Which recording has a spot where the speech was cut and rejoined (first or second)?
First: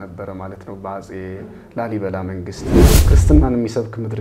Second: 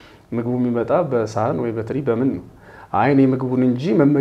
first